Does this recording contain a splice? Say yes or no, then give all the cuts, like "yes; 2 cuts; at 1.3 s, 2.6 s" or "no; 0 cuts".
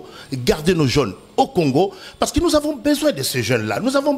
no; 0 cuts